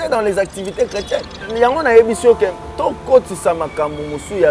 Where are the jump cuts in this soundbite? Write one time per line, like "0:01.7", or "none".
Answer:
0:01.4

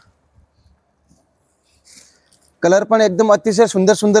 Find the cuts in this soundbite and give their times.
none

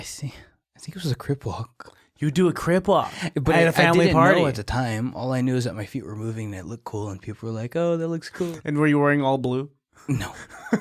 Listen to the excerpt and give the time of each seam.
0:08.5

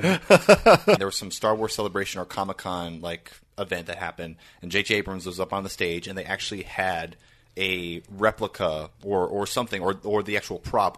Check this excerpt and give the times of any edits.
0:01.0

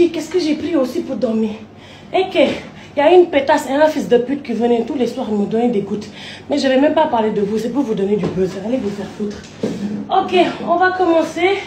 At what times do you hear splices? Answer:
none

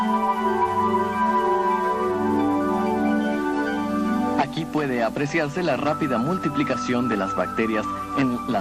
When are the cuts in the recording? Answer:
0:04.0

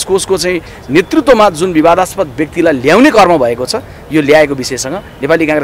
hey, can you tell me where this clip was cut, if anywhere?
none

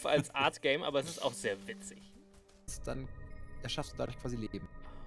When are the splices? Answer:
0:02.8

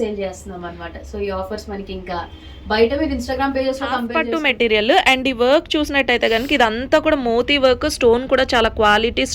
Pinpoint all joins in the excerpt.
0:04.1

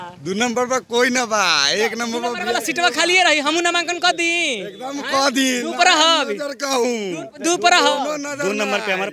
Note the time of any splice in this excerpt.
none

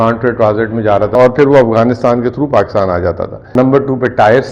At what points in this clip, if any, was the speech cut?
0:01.1
0:03.4

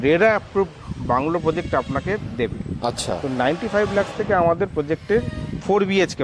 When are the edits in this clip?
none

